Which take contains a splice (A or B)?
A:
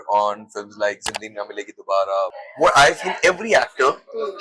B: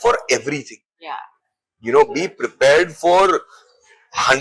A